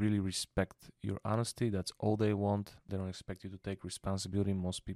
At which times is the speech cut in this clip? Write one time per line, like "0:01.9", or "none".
0:02.9